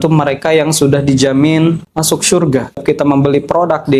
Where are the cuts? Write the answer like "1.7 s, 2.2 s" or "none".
2.3 s